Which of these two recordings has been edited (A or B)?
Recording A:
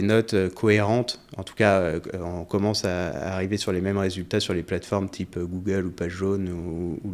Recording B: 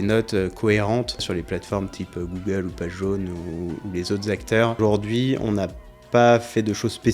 B